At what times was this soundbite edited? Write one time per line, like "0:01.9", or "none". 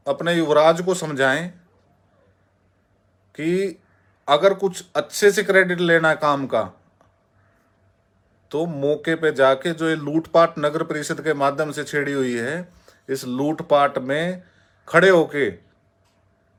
none